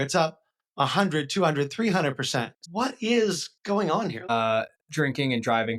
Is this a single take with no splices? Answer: no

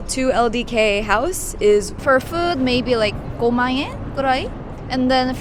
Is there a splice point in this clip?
yes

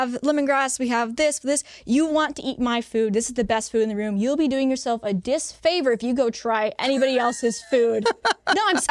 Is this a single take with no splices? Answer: yes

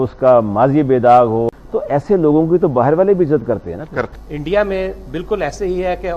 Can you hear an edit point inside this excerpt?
yes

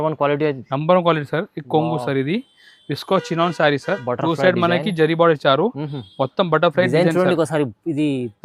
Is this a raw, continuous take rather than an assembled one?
yes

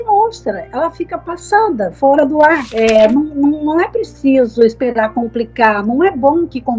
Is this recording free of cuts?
no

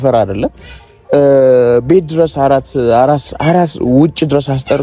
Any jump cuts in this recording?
no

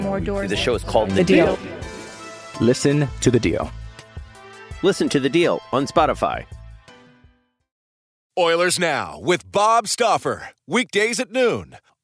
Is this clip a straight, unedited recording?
no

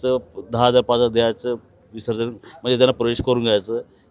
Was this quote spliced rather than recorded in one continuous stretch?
no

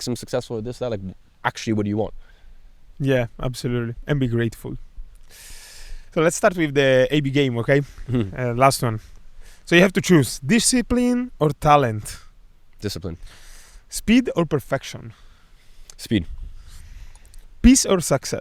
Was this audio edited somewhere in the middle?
no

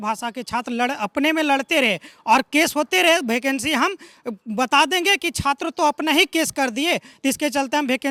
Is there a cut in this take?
no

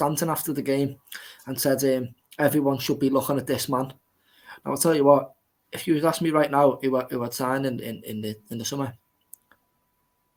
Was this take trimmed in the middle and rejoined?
no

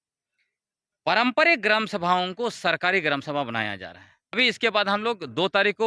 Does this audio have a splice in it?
yes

